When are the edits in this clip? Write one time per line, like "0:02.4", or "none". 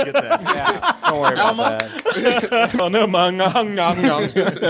0:02.7

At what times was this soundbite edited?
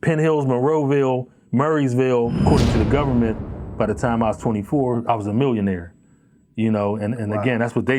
0:02.4

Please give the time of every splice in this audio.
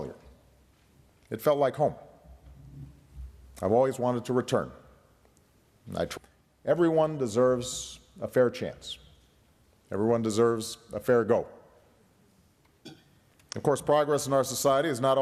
none

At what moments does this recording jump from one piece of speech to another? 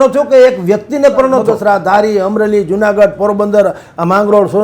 0:01.5

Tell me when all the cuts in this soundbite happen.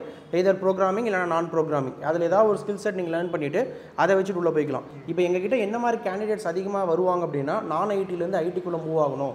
none

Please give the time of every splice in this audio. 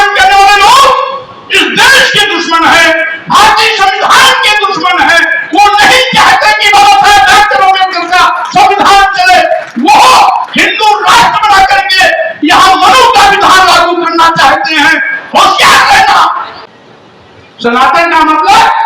0:16.6

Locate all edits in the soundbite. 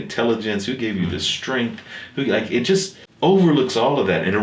0:03.0

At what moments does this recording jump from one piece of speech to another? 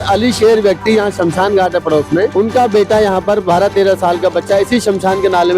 0:02.3

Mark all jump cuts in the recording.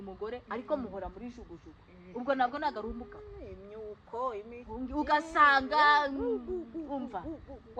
none

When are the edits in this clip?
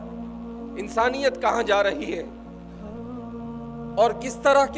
0:02.2
0:03.7

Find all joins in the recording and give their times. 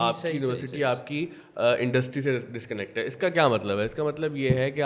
none

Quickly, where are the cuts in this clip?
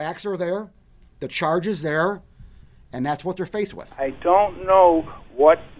0:03.8

